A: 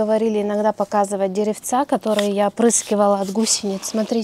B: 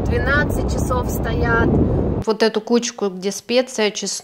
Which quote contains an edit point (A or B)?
B